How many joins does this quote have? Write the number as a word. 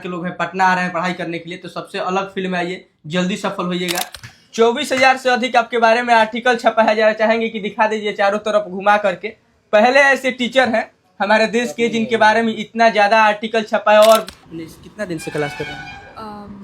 two